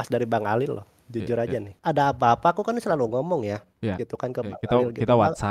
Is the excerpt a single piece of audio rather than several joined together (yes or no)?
no